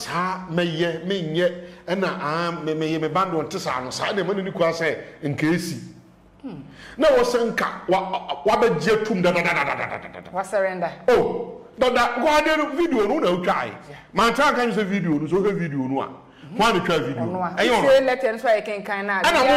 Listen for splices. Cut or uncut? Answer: uncut